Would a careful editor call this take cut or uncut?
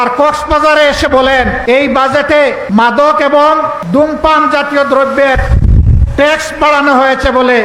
cut